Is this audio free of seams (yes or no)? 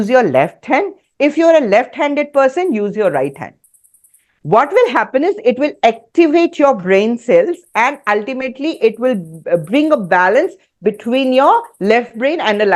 yes